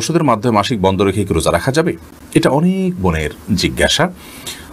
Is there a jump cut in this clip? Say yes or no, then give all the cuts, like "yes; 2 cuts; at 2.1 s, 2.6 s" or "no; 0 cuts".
no; 0 cuts